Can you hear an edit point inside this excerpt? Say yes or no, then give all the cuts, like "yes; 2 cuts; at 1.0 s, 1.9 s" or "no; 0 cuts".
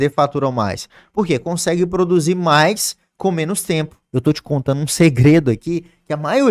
yes; 1 cut; at 4.0 s